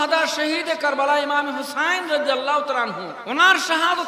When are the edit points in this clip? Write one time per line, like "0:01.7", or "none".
0:03.1

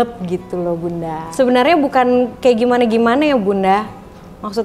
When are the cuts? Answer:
none

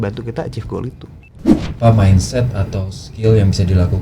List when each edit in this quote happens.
0:01.5

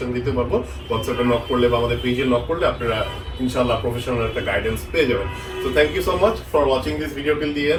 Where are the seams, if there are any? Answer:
none

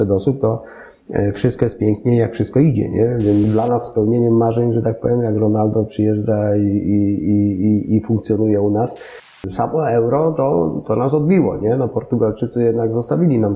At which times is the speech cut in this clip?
0:03.5
0:09.4

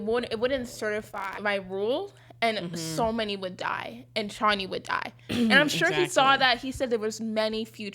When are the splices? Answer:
0:01.2

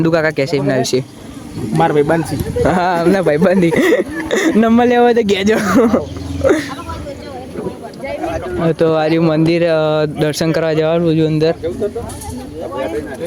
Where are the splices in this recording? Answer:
none

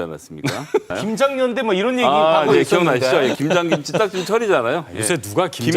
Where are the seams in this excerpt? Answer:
0:01.0

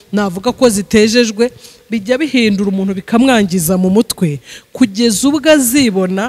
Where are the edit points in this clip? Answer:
none

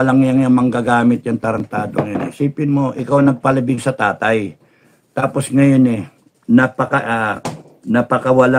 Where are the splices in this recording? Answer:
none

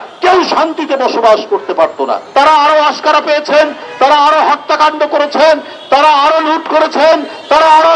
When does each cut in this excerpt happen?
0:02.2

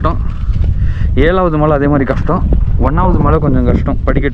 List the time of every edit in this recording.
none

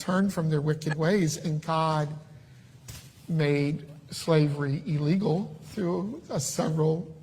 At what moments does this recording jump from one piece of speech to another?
0:02.1

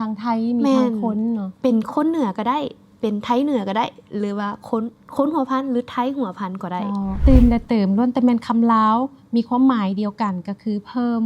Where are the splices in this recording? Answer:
0:07.2

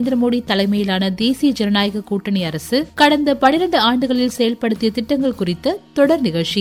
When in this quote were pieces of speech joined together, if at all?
none

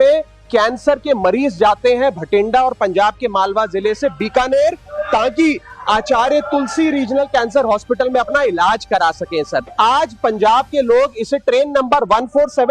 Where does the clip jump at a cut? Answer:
0:09.7

